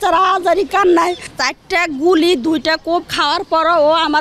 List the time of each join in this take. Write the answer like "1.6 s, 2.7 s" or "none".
1.4 s